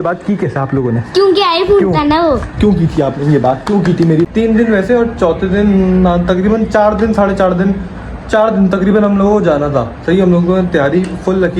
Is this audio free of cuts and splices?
no; 1 cut; at 4.3 s

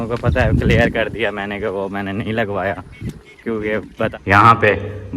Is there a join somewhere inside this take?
yes; 1 cut; at 4.1 s

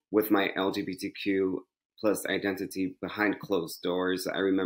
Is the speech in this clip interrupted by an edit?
no; 0 cuts

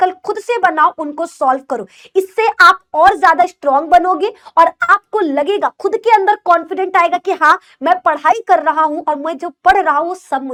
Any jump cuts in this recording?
no; 0 cuts

